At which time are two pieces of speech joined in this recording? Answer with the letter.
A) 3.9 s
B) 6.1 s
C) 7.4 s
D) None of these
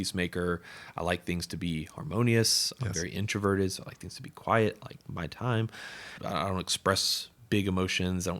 B